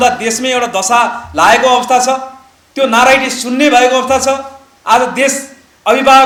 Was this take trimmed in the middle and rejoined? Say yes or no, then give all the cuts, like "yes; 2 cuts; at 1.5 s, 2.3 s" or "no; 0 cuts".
no; 0 cuts